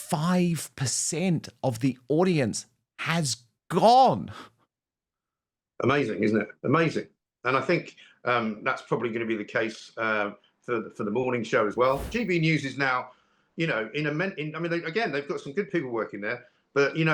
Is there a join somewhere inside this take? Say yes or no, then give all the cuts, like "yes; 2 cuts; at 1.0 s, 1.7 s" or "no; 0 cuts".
yes; 1 cut; at 12.1 s